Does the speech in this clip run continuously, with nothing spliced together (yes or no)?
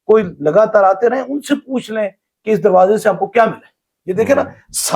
yes